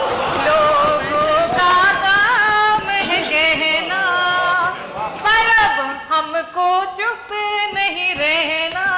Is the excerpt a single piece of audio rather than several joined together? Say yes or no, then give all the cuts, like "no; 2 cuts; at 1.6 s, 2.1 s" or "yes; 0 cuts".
yes; 0 cuts